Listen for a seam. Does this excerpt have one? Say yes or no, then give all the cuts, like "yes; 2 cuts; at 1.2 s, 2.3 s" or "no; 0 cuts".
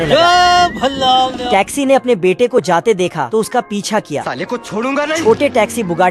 no; 0 cuts